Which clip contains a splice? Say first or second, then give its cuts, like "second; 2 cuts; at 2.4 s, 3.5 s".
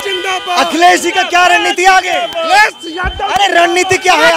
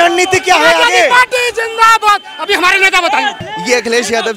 second; 1 cut; at 3.5 s